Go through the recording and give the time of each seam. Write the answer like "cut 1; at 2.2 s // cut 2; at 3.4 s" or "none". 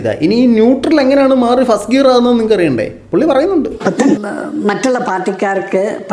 cut 1; at 4.3 s